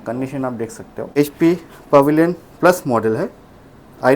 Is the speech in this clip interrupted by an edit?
yes; 1 cut; at 1.2 s

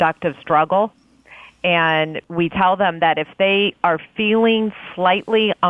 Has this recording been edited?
yes; 1 cut; at 2.2 s

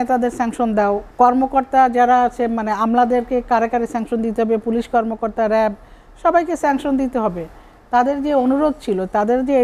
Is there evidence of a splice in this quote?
yes; 1 cut; at 1.1 s

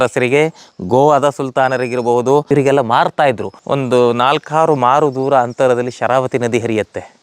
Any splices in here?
yes; 2 cuts; at 2.5 s, 3.5 s

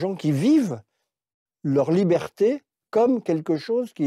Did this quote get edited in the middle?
no; 0 cuts

